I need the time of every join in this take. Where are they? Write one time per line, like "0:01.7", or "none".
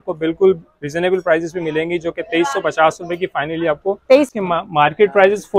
0:04.3